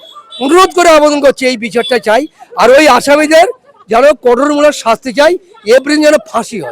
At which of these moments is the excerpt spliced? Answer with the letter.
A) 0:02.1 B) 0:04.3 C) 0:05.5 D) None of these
D